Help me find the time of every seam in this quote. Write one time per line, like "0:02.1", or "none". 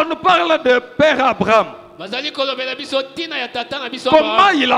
none